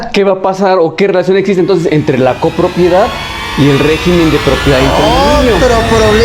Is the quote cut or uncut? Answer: uncut